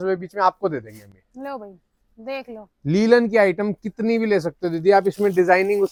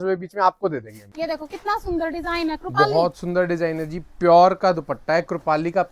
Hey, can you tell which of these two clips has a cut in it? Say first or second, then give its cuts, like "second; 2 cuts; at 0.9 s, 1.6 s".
second; 1 cut; at 1.0 s